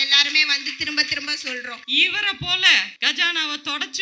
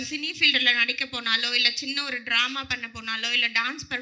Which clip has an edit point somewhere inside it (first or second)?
first